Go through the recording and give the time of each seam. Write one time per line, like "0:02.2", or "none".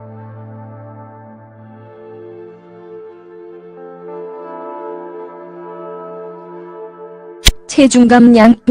0:01.3